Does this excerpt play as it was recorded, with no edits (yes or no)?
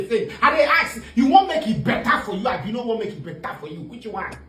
yes